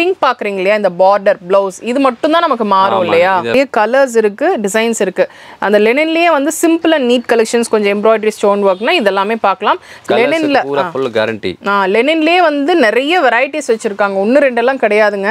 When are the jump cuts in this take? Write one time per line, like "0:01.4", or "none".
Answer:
0:03.5
0:09.9